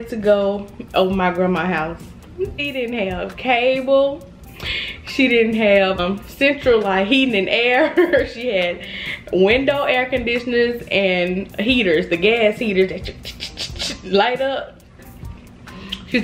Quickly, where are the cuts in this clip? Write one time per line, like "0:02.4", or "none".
0:02.6
0:06.0
0:15.1